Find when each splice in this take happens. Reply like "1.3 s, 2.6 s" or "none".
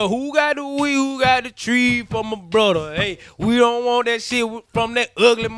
none

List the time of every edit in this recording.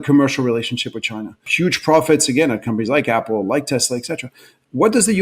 1.5 s

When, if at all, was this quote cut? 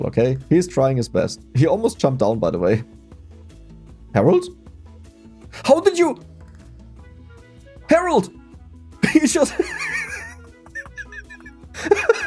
none

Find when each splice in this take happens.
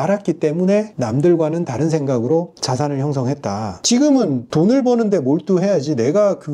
1.0 s, 2.6 s, 3.8 s

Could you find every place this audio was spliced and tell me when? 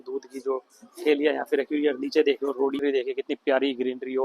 2.8 s

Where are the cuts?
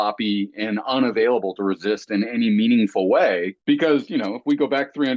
3.5 s

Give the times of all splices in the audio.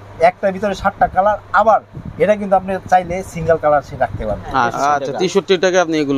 4.7 s

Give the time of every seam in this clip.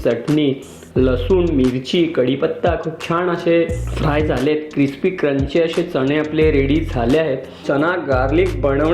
7.6 s

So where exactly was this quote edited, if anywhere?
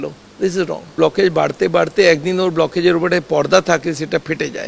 0.9 s

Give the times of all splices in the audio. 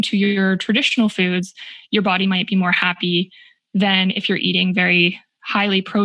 none

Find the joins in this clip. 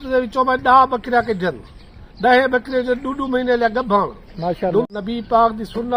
4.9 s

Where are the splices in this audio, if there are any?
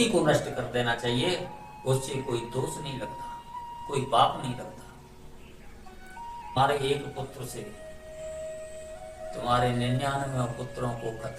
6.6 s

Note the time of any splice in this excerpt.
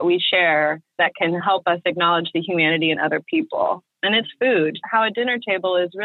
1.2 s, 4.8 s

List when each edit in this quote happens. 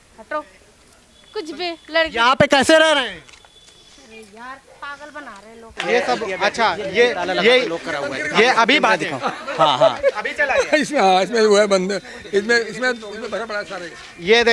5.7 s

